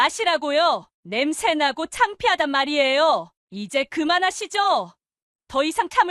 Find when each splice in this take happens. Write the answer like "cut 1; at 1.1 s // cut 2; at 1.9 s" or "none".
cut 1; at 3.3 s